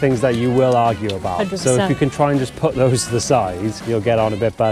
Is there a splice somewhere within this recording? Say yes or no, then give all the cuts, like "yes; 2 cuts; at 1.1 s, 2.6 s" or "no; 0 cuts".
yes; 1 cut; at 3.8 s